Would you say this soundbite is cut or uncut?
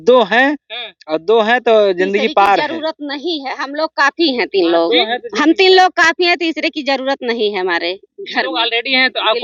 uncut